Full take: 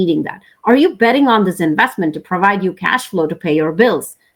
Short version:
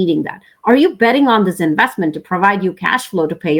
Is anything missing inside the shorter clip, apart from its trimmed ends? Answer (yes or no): no